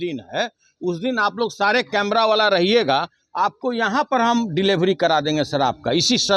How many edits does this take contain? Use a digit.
0